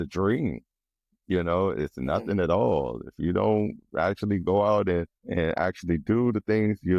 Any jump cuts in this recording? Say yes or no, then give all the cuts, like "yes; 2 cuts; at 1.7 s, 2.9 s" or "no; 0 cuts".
yes; 1 cut; at 5.2 s